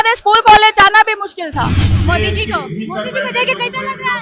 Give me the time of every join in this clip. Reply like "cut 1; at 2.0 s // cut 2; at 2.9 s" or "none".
cut 1; at 1.9 s